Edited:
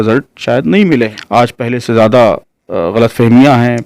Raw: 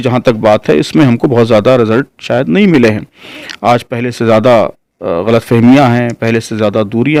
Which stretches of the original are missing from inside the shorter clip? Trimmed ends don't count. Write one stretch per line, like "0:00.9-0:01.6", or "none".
0:03.0-0:03.5

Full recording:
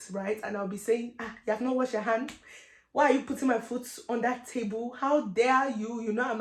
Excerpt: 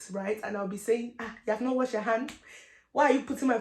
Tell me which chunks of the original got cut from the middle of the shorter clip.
none

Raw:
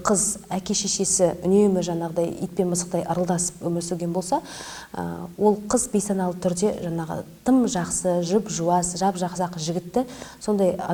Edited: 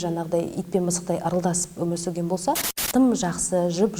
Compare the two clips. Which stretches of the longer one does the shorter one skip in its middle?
0:04.6-0:07.3

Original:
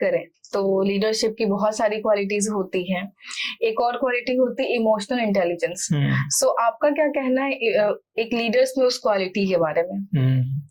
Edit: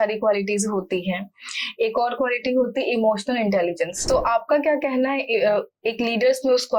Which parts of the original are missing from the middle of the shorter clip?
0:05.8-0:06.3

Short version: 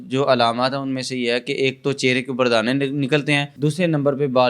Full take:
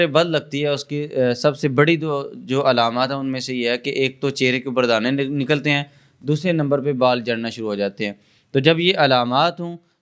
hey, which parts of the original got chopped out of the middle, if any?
0:05.9-0:06.2

